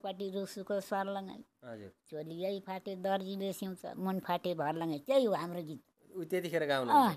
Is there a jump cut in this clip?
no; 0 cuts

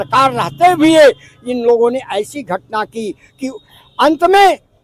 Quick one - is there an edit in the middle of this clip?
no; 0 cuts

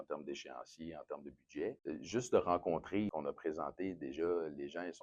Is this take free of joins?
no; 2 cuts; at 1.8 s, 3.1 s

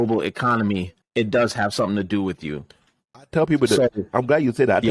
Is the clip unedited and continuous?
no; 1 cut; at 1.0 s

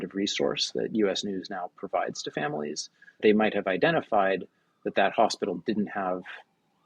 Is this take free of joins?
no; 1 cut; at 3.2 s

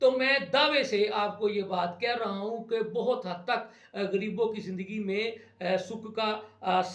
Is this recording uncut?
yes; 0 cuts

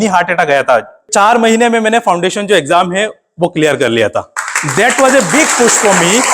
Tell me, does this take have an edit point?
yes; 1 cut; at 1.0 s

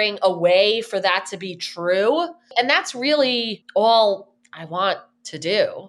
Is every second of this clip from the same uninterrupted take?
no; 2 cuts; at 2.5 s, 3.6 s

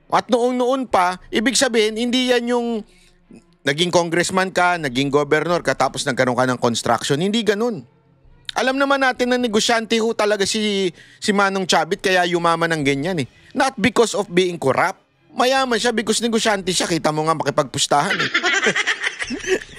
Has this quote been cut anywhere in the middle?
no; 0 cuts

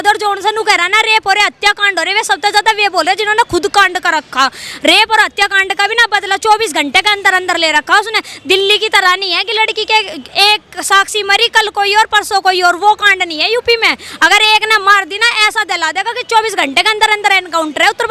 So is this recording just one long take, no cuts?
yes; 0 cuts

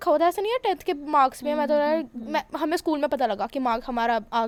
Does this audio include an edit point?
no; 0 cuts

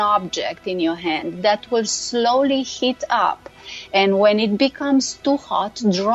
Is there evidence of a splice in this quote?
no; 0 cuts

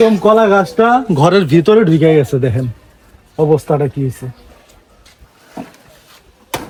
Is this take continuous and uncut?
yes; 0 cuts

